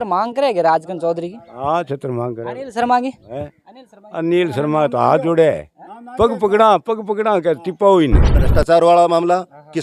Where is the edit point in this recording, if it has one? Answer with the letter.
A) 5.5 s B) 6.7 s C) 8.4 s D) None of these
C